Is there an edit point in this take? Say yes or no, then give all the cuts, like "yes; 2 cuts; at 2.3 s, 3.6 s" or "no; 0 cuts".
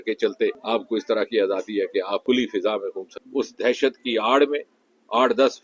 yes; 1 cut; at 3.1 s